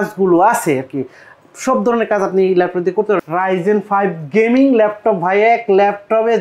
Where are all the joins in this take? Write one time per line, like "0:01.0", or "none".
0:03.2